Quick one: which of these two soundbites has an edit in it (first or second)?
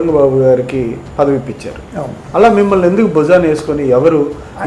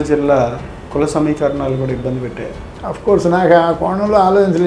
first